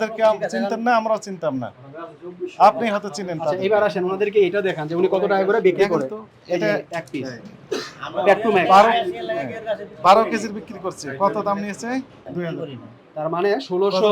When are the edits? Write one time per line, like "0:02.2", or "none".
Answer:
0:12.3